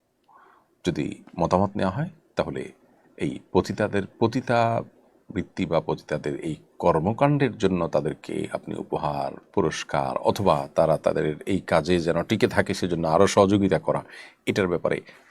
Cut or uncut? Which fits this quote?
uncut